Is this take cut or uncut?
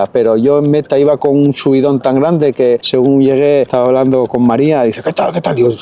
cut